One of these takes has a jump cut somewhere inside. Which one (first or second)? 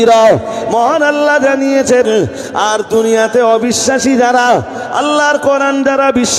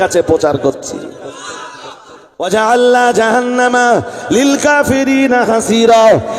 second